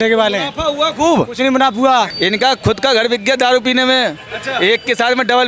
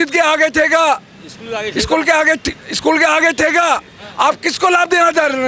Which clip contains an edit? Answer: first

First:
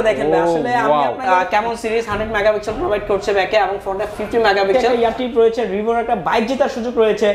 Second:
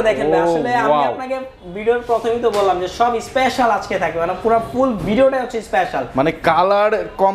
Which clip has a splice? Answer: first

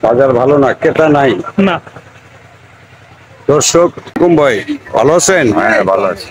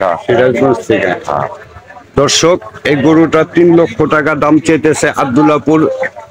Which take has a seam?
first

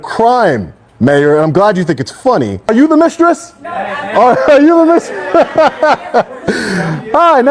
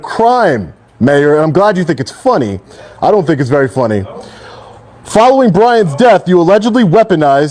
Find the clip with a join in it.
first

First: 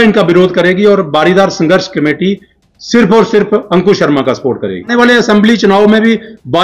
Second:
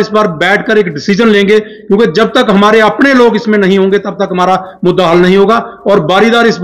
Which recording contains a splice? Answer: first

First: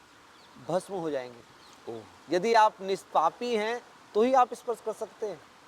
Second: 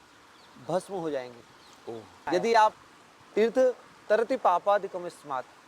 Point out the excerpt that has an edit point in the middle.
second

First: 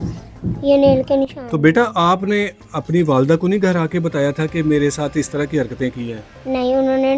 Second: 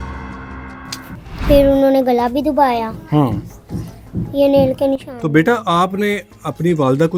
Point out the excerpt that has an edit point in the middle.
first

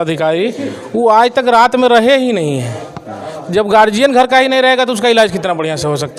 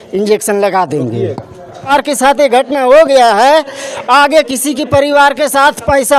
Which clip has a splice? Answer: second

